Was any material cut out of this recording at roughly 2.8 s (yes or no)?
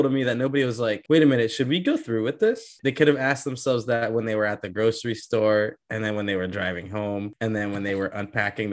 yes